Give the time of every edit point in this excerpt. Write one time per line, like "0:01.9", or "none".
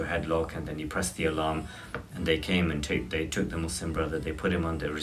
none